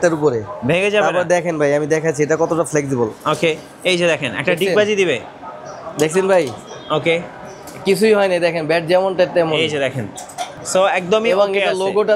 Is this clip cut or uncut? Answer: uncut